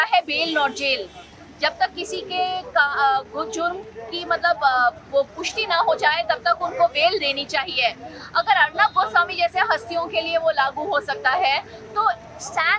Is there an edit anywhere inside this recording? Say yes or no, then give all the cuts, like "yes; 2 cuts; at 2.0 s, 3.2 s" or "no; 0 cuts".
no; 0 cuts